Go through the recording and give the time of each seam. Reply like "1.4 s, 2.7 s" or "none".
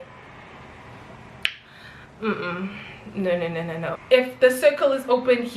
3.9 s